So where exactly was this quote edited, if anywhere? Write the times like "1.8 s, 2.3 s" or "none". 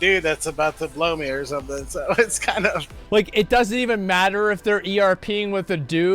2.9 s